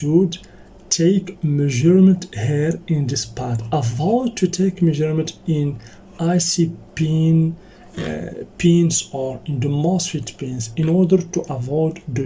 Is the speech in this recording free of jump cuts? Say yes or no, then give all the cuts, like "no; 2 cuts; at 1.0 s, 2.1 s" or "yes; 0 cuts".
yes; 0 cuts